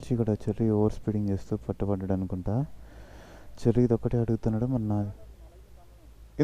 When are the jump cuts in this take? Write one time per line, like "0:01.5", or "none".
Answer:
none